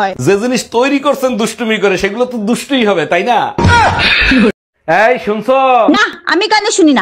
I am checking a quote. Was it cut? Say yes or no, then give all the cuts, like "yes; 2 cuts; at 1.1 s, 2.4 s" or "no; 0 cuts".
yes; 1 cut; at 4.6 s